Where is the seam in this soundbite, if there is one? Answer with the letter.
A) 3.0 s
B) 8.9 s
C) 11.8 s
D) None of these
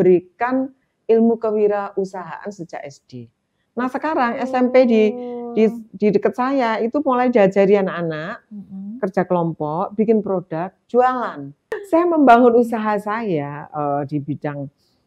C